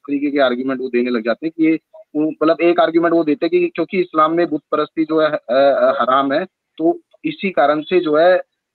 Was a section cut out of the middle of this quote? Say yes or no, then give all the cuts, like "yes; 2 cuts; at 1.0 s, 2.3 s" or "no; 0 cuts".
no; 0 cuts